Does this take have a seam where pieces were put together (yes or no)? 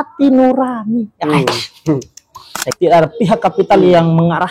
yes